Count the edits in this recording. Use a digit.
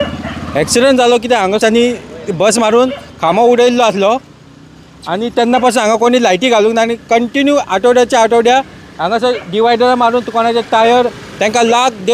1